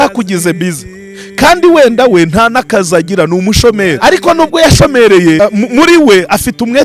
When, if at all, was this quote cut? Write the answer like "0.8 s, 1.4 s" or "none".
4.0 s, 5.4 s